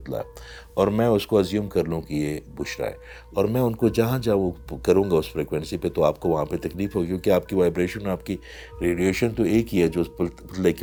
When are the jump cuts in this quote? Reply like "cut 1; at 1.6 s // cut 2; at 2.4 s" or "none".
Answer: none